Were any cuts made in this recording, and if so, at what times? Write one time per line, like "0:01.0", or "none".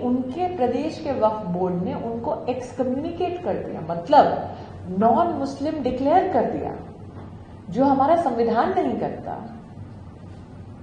none